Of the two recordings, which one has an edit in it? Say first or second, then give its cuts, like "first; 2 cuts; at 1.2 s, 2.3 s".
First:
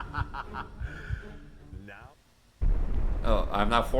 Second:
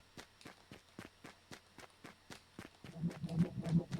first; 1 cut; at 1.8 s